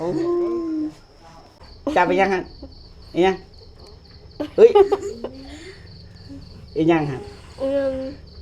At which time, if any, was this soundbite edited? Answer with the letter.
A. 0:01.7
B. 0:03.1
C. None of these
A